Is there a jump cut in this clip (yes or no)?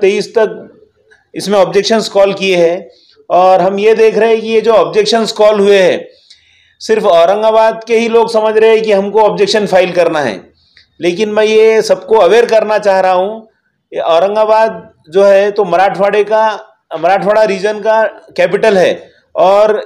no